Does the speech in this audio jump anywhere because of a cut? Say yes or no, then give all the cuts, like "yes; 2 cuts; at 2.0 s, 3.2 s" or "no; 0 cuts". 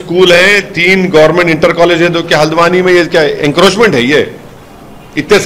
no; 0 cuts